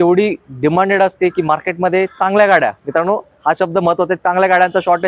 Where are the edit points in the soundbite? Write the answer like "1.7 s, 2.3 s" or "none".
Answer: none